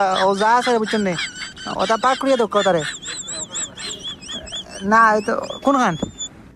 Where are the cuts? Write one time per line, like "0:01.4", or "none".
none